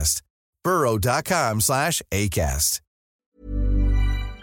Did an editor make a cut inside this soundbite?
yes; 1 cut; at 3.1 s

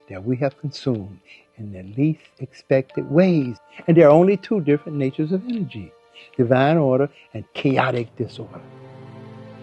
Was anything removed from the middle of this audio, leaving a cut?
yes; 1 cut; at 8.7 s

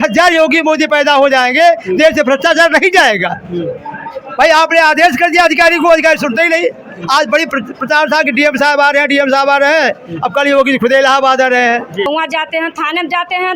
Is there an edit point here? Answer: yes; 1 cut; at 12.1 s

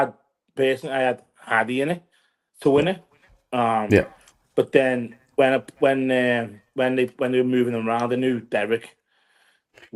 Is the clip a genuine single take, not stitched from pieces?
yes; 0 cuts

